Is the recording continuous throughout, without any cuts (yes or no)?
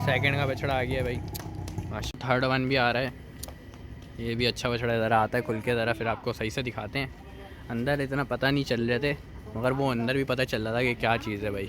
no